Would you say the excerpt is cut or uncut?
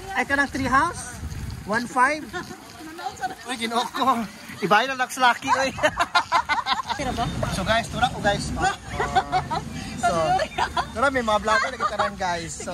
cut